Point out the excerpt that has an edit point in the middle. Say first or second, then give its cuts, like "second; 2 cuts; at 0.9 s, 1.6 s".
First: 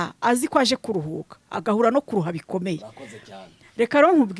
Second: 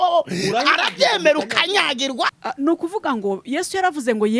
second; 1 cut; at 2.4 s